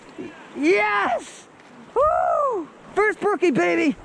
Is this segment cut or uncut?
cut